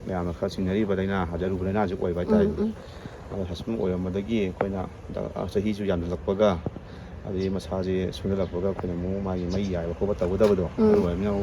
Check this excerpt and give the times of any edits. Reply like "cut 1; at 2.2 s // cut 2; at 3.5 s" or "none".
none